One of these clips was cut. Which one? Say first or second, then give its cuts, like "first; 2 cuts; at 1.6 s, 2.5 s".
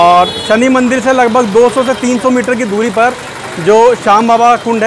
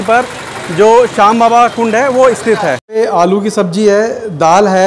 second; 1 cut; at 3.0 s